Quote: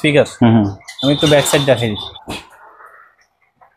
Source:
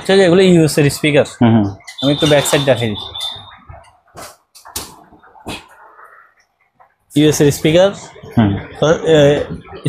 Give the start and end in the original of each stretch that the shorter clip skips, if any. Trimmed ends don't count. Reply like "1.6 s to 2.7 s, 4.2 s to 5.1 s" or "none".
3.1 s to 5.3 s